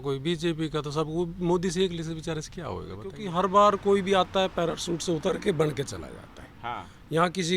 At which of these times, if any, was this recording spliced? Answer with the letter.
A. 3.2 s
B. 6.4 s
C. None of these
A